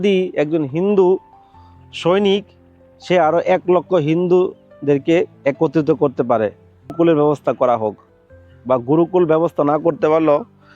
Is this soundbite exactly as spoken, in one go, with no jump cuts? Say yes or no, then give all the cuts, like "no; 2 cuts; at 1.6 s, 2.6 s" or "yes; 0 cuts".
no; 1 cut; at 6.9 s